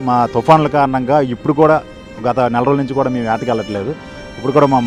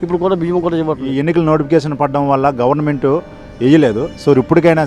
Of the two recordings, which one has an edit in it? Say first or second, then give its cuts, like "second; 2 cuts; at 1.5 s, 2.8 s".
second; 1 cut; at 1.1 s